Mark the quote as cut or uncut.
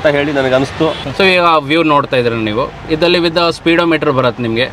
cut